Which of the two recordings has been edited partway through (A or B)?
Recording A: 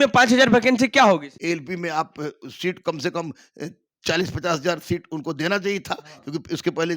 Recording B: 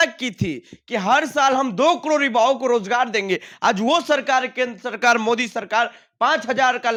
A